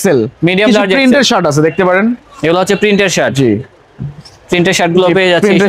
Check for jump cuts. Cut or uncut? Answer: uncut